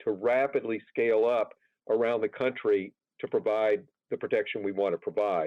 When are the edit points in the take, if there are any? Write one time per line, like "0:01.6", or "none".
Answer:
none